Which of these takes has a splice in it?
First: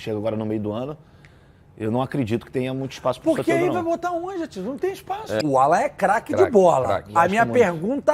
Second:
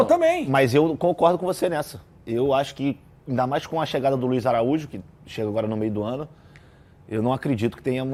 first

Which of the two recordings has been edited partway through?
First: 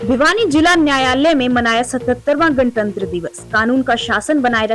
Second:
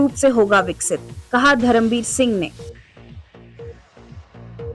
second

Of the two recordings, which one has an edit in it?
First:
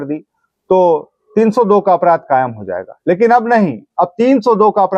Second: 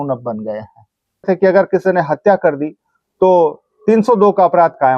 second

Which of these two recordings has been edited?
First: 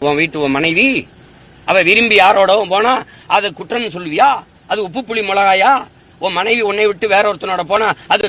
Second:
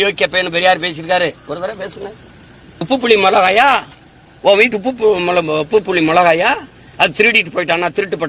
second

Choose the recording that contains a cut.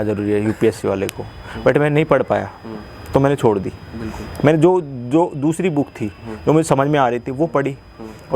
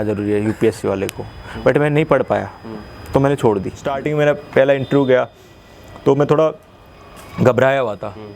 second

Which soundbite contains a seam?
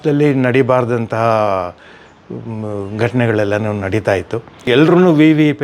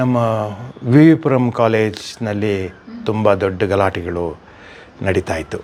first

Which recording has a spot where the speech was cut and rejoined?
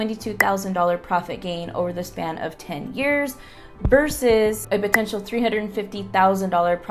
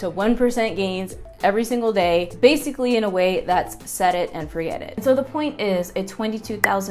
second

